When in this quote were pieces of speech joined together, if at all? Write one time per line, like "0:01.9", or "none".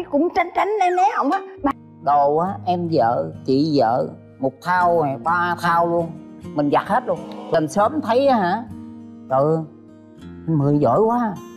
0:01.7
0:07.6